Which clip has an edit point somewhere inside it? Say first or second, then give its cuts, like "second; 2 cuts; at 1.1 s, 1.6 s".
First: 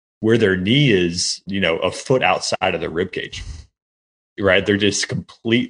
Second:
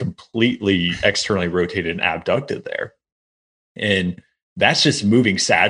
first; 2 cuts; at 1.4 s, 2.6 s